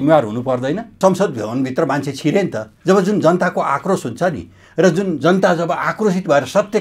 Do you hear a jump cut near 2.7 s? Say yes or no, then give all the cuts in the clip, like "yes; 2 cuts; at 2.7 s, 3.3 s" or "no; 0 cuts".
yes; 2 cuts; at 1.0 s, 2.7 s